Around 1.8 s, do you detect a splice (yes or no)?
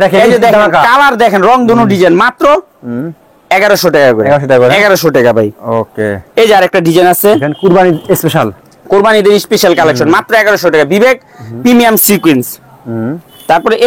no